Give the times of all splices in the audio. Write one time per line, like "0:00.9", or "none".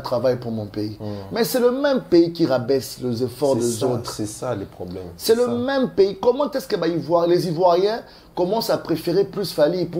none